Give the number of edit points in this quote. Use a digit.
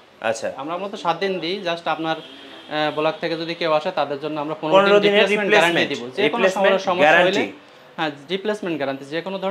0